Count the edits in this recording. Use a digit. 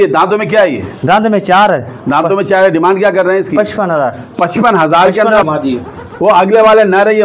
1